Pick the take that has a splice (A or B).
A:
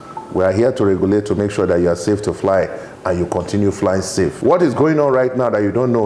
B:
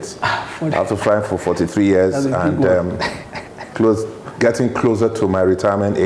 A